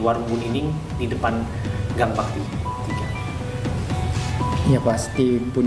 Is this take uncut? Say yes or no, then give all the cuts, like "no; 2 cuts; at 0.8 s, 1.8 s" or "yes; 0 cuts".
yes; 0 cuts